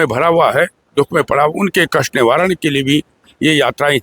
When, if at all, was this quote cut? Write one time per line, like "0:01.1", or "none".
none